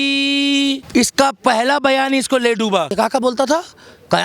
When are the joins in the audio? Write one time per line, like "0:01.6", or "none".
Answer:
0:00.8
0:02.9

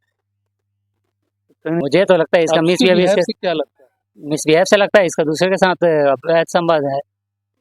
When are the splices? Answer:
0:01.8

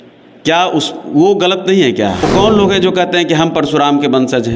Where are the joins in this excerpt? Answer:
0:02.2

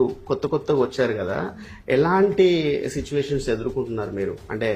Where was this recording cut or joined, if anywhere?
none

